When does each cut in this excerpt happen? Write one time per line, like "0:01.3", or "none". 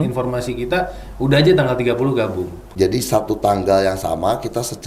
0:02.7